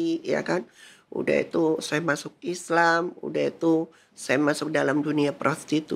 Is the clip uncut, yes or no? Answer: yes